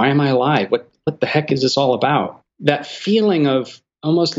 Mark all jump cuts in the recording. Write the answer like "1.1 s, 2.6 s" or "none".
2.4 s